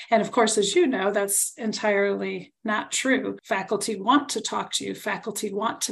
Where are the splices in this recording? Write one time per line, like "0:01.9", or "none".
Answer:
0:03.4